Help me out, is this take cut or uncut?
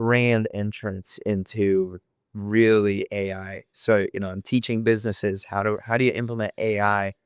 uncut